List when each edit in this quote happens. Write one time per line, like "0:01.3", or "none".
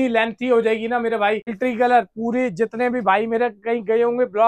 0:01.6